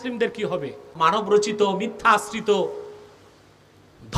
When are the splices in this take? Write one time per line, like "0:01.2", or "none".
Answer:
0:00.9